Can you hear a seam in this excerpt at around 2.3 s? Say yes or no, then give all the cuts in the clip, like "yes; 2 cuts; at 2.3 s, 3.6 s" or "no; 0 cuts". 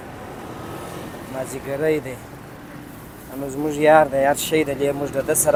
no; 0 cuts